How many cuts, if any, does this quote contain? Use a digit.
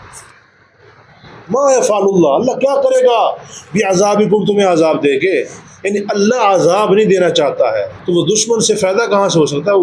1